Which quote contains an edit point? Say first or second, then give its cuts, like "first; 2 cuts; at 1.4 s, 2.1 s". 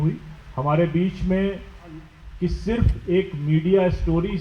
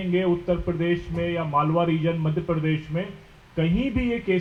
first; 1 cut; at 2.2 s